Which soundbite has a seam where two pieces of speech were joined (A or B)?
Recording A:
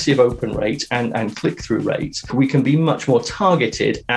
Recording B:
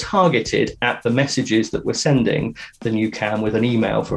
A